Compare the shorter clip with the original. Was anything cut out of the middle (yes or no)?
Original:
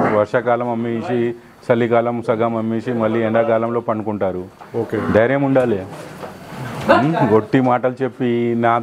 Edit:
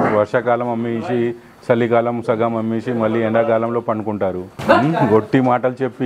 yes